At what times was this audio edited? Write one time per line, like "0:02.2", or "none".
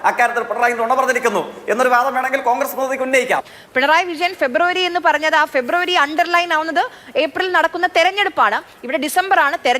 0:03.5